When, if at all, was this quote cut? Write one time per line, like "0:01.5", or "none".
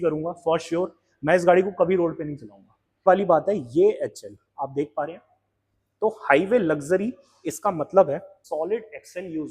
0:03.0
0:08.4